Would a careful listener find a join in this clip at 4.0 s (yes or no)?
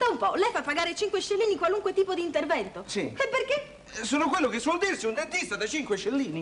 yes